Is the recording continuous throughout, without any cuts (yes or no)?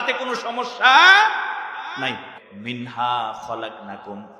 no